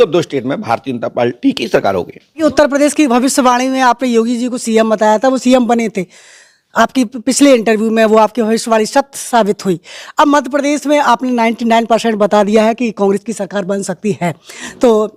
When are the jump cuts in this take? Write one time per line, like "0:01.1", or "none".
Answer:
none